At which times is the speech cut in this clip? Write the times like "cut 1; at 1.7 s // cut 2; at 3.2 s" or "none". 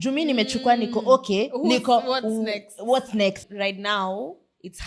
cut 1; at 3.4 s